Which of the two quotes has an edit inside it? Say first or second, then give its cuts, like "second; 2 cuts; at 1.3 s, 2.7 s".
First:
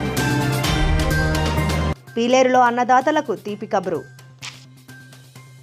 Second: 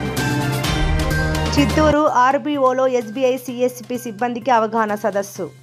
first; 1 cut; at 1.5 s